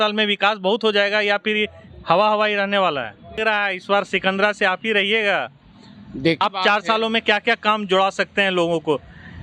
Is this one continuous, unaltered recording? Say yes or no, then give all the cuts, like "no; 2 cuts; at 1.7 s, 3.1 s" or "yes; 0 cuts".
no; 2 cuts; at 3.4 s, 6.4 s